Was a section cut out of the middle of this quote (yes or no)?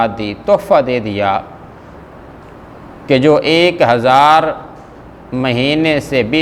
no